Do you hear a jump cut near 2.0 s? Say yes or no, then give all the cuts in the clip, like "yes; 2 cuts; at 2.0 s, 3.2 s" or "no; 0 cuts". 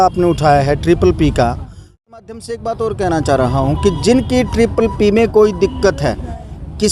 yes; 1 cut; at 2.0 s